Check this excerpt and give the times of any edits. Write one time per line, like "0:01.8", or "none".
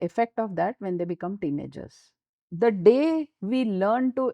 0:02.4